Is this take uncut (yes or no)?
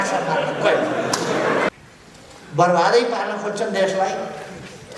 no